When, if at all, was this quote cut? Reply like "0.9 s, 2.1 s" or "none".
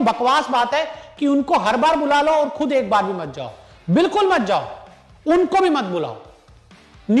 none